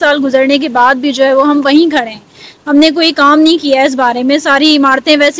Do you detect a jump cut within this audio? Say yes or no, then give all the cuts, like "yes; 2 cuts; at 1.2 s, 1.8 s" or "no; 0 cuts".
no; 0 cuts